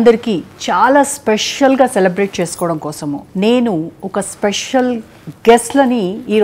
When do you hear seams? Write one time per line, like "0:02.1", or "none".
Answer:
none